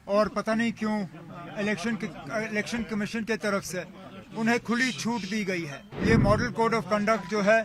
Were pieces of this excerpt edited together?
yes; 1 cut; at 5.9 s

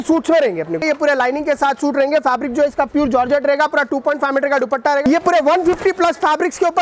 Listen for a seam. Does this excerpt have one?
yes; 2 cuts; at 0.8 s, 5.1 s

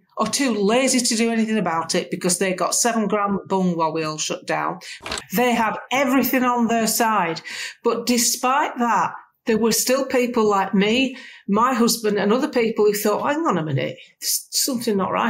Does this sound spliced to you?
yes; 1 cut; at 4.9 s

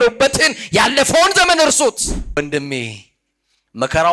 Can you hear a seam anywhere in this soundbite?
yes; 1 cut; at 2.4 s

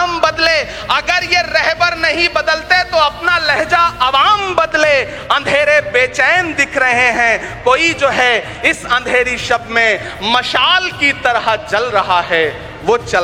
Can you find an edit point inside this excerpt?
no; 0 cuts

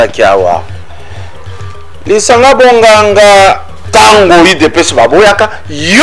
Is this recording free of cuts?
no; 1 cut; at 3.7 s

